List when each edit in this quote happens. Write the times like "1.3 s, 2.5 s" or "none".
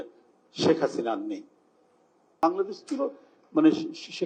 2.4 s